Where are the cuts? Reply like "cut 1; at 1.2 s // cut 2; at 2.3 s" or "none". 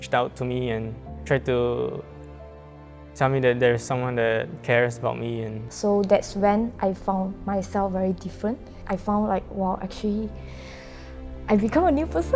cut 1; at 1.1 s // cut 2; at 5.6 s // cut 3; at 8.7 s